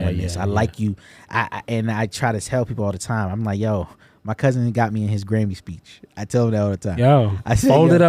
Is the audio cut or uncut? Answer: uncut